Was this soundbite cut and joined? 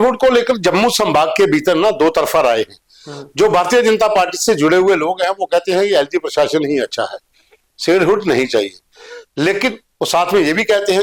no; 0 cuts

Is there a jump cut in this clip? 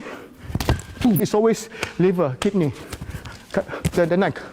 yes; 1 cut; at 1.2 s

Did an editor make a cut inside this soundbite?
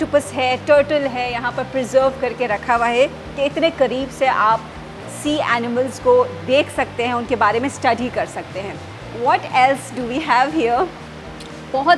no; 0 cuts

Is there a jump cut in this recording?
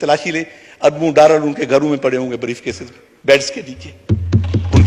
no; 0 cuts

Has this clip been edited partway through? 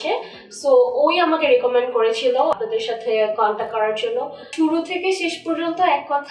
yes; 2 cuts; at 2.5 s, 4.5 s

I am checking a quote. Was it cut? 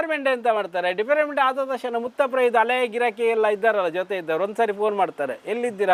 no; 0 cuts

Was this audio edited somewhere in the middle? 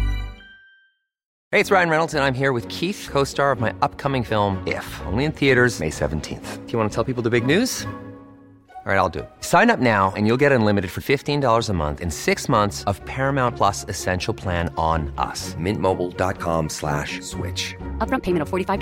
yes; 1 cut; at 1.2 s

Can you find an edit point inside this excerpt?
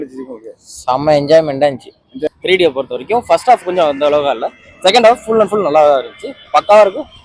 yes; 1 cut; at 2.3 s

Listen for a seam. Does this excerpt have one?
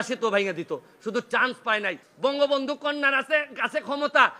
yes; 1 cut; at 2.0 s

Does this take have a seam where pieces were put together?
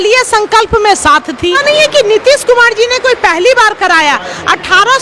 yes; 1 cut; at 1.6 s

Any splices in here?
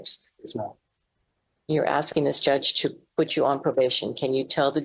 no; 0 cuts

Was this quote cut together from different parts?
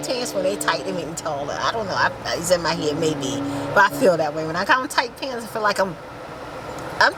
no; 0 cuts

